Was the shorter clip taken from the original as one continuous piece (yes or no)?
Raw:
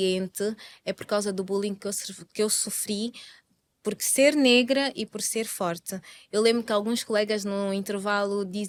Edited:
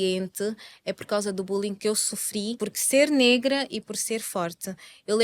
no